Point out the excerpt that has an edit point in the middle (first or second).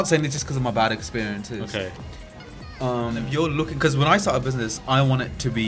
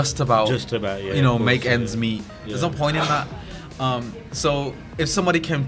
first